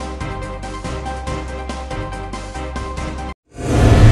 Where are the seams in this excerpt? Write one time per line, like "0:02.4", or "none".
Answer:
0:00.9
0:02.5